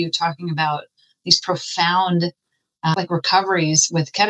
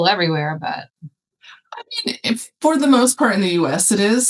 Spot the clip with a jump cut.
first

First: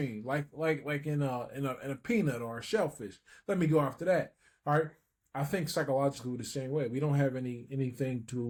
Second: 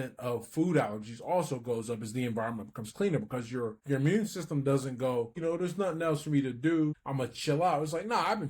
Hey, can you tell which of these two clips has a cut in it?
second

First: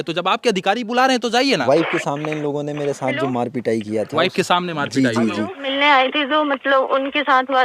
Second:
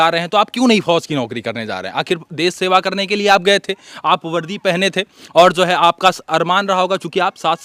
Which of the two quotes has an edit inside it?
first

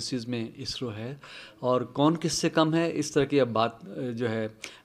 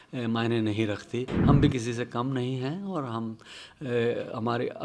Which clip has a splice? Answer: second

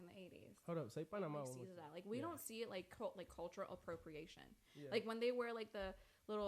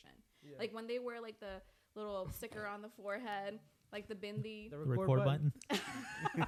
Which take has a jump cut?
first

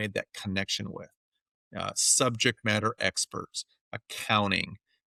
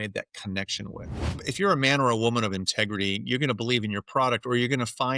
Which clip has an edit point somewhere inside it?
second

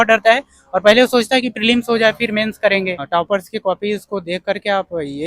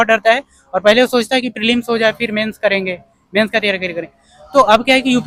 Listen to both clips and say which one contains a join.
first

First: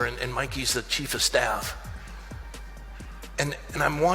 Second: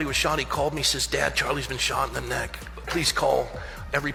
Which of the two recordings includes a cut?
first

